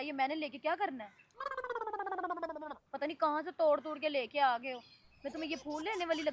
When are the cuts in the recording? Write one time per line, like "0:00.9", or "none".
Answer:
none